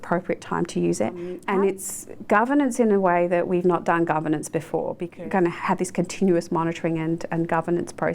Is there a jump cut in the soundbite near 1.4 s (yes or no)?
yes